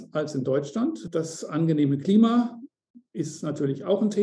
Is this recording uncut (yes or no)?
no